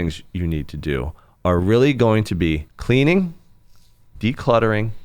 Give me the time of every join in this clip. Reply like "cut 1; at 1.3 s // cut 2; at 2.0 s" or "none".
cut 1; at 2.7 s